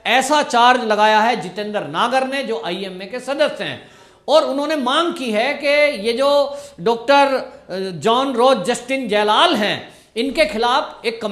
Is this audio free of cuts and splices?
yes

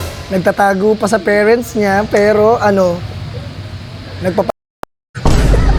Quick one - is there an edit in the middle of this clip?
no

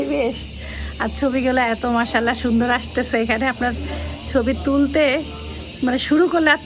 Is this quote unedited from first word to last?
yes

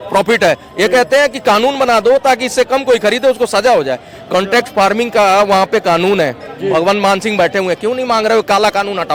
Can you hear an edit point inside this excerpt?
no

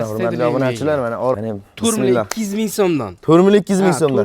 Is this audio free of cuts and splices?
no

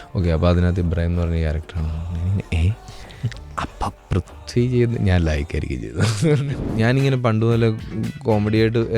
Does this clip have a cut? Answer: yes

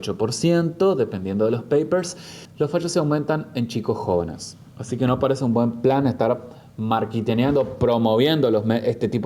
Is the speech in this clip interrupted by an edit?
no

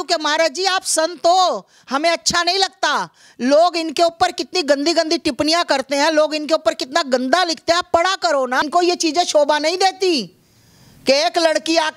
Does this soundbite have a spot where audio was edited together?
yes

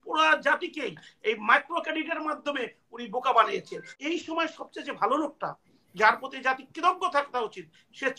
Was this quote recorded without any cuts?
no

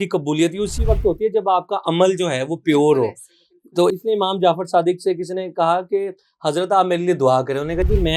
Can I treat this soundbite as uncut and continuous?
no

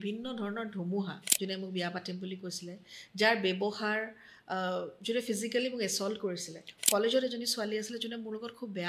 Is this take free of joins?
no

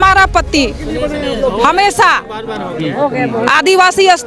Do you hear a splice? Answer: no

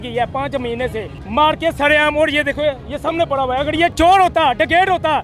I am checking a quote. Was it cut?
yes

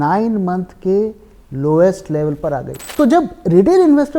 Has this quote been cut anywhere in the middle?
yes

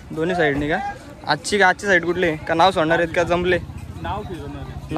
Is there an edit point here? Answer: no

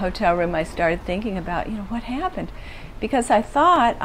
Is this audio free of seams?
yes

